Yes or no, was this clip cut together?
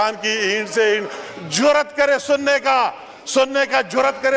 no